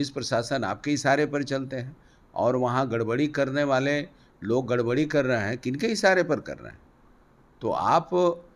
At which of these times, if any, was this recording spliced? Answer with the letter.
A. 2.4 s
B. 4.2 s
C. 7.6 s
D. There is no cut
D